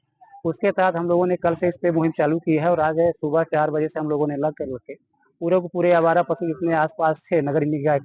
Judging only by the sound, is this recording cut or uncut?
uncut